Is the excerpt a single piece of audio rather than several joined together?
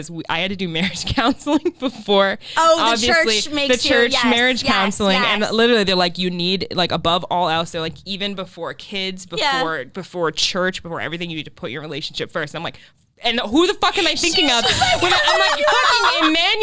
yes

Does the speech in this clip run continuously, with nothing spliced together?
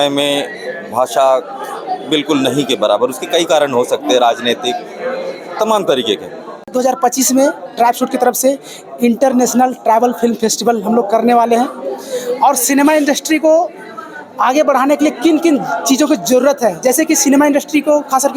no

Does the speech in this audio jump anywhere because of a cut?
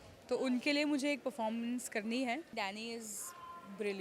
yes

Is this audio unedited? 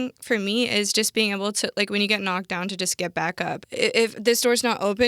no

